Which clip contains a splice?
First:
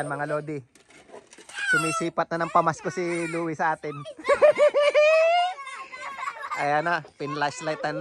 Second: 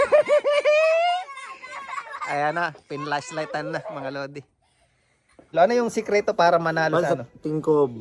second; 1 cut; at 5.5 s

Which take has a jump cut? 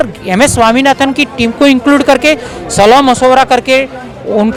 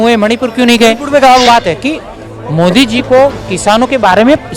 second; 1 cut; at 1.4 s

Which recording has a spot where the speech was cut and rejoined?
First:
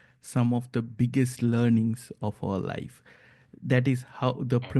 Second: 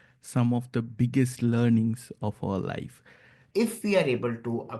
second; 1 cut; at 3.4 s

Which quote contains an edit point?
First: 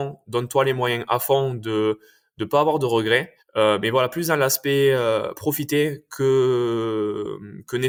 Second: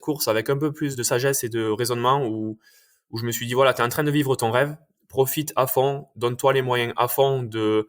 second; 1 cut; at 0.9 s

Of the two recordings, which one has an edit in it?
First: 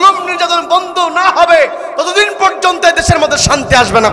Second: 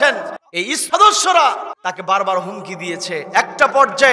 second; 2 cuts; at 0.8 s, 1.7 s

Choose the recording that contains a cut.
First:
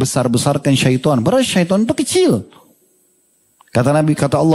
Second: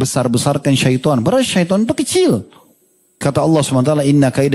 second; 1 cut; at 3.2 s

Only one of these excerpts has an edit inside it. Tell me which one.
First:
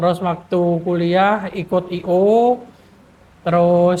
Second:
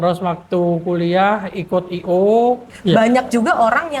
second; 1 cut; at 2.7 s

